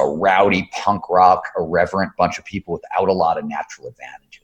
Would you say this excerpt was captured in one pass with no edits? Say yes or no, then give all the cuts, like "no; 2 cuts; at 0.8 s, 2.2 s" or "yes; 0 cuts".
yes; 0 cuts